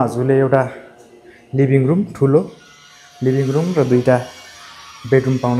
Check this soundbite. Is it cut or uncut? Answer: uncut